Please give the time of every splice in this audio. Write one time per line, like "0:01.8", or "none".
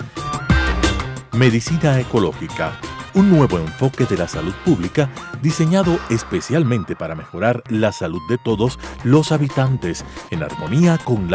none